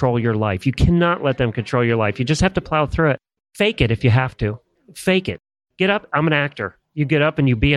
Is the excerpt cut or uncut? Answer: uncut